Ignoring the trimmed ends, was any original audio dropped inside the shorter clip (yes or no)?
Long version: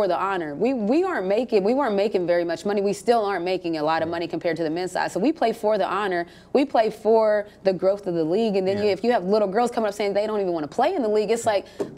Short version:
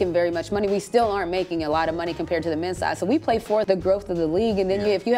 yes